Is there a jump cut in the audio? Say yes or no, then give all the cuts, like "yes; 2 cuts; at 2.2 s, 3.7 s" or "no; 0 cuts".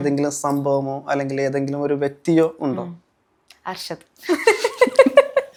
no; 0 cuts